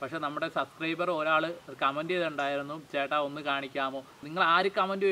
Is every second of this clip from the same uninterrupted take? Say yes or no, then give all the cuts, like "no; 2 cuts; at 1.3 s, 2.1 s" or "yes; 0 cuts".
no; 1 cut; at 4.2 s